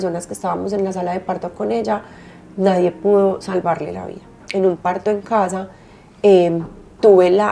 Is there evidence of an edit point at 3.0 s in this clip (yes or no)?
no